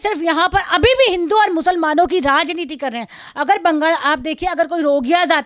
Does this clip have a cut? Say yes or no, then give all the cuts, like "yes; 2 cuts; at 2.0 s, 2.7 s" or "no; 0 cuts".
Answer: no; 0 cuts